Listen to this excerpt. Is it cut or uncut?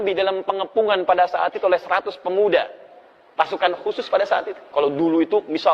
cut